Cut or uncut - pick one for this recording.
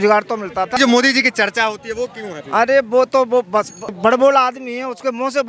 cut